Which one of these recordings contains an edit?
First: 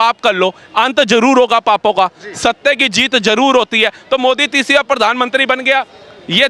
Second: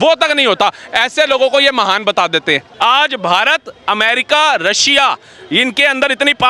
second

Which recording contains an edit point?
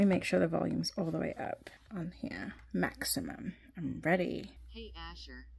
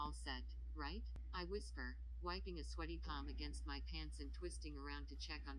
first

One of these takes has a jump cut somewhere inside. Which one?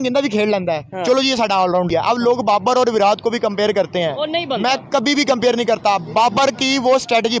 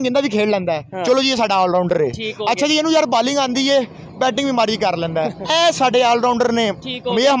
first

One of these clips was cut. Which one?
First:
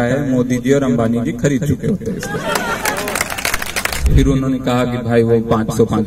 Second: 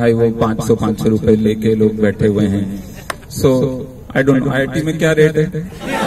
first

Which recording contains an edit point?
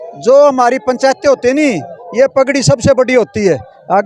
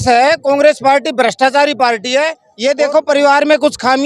second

